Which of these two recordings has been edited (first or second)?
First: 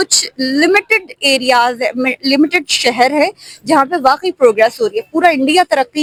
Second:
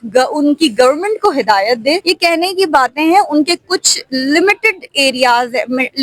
second